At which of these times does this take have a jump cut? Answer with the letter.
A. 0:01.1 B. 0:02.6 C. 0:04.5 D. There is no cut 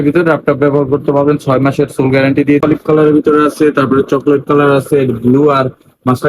B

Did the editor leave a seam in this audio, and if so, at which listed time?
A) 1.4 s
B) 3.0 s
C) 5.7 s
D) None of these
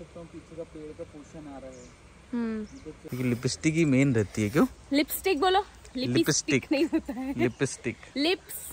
B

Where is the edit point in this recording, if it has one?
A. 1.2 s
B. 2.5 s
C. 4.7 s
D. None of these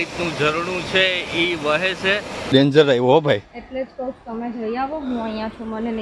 B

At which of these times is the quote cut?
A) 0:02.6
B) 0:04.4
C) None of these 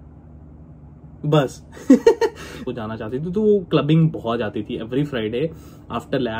A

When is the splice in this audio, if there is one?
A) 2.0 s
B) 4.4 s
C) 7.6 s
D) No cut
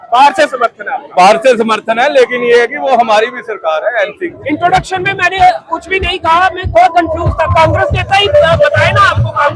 B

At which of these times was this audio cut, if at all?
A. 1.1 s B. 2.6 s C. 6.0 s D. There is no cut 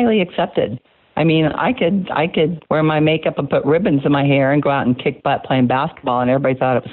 B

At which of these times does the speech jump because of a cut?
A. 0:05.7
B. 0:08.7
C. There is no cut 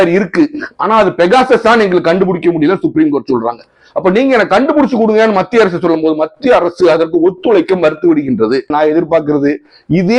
B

